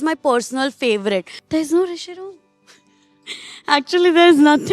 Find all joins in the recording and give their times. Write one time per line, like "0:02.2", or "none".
0:01.4